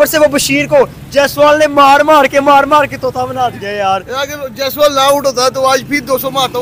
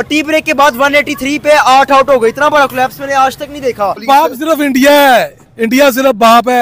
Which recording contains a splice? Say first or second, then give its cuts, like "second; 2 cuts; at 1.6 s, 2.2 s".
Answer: second; 1 cut; at 4.0 s